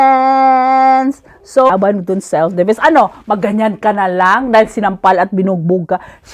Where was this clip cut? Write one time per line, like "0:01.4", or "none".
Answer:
0:01.7

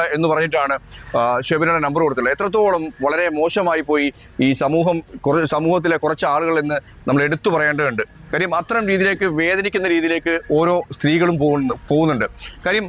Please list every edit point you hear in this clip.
none

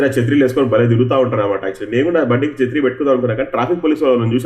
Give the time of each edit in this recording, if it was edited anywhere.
none

